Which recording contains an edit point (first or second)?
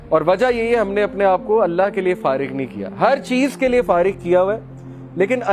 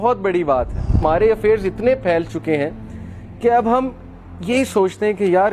second